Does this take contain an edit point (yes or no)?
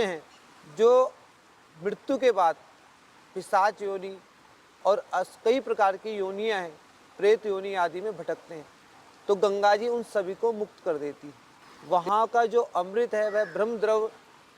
yes